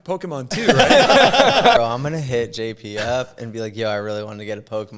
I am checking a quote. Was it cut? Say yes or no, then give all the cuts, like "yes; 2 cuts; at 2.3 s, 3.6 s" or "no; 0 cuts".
yes; 1 cut; at 1.8 s